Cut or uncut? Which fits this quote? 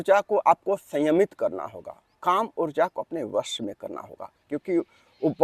uncut